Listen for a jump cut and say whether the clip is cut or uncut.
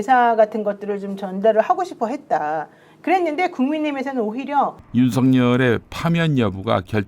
cut